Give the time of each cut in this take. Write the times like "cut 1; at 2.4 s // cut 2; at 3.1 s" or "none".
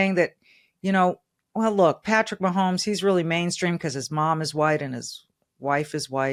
none